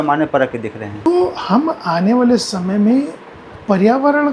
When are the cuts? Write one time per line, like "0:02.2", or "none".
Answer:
0:01.1